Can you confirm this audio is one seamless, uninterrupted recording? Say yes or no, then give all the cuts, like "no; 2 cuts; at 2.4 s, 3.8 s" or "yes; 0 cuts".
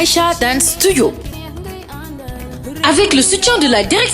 no; 1 cut; at 1.3 s